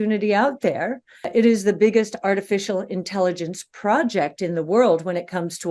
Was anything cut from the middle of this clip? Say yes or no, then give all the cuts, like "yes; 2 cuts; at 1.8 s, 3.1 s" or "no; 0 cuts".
yes; 2 cuts; at 1.1 s, 5.0 s